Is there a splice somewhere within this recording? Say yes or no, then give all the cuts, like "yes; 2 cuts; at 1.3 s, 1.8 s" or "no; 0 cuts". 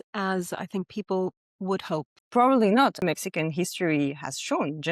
yes; 2 cuts; at 2.2 s, 3.0 s